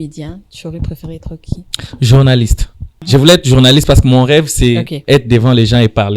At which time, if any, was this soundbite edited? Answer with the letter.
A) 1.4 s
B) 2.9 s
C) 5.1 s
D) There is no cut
B